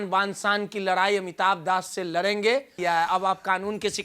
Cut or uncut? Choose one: cut